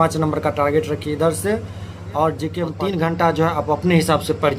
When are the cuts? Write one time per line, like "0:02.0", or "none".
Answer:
0:02.7